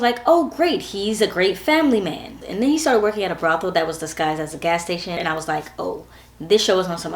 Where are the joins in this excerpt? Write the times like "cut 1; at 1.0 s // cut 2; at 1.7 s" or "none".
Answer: cut 1; at 2.3 s // cut 2; at 5.2 s